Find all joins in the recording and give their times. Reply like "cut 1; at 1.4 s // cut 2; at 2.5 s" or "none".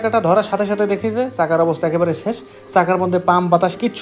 none